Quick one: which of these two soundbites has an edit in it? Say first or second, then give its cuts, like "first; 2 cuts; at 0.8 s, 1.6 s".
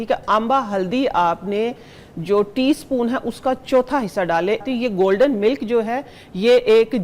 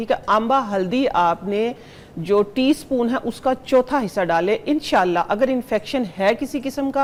first; 1 cut; at 4.6 s